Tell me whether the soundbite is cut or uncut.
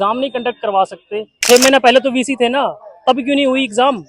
cut